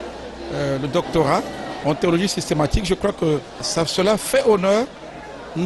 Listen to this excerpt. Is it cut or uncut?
cut